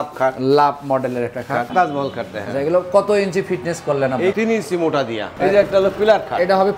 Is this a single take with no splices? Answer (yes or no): no